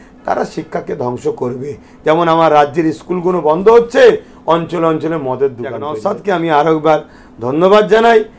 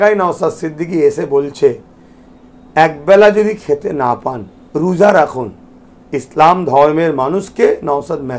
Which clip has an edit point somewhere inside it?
first; 1 cut; at 6.0 s

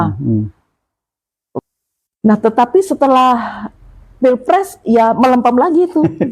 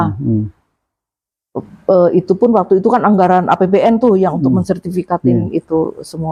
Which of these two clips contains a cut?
first; 1 cut; at 1.6 s

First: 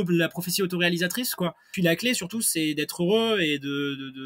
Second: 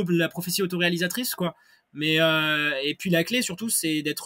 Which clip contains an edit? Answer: first; 1 cut; at 1.7 s

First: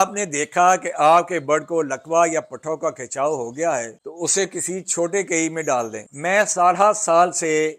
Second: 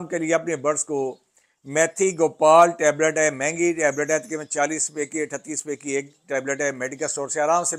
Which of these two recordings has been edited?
first; 2 cuts; at 4.0 s, 6.0 s

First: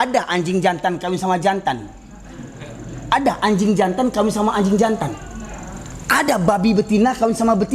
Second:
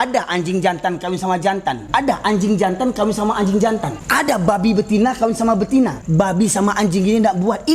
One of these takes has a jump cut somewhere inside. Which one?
second; 3 cuts; at 1.8 s, 4.0 s, 6.0 s

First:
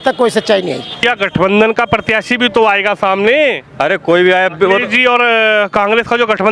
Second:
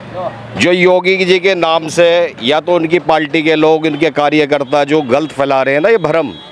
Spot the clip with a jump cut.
first; 1 cut; at 0.9 s

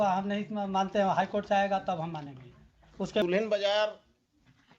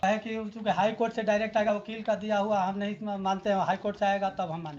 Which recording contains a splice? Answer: first; 1 cut; at 3.2 s

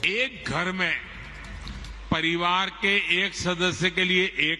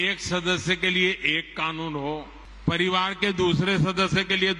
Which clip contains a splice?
second; 1 cut; at 2.4 s

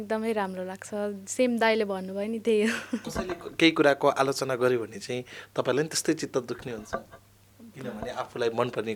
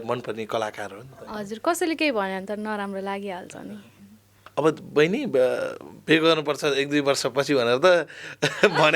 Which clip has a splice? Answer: second; 1 cut; at 4.4 s

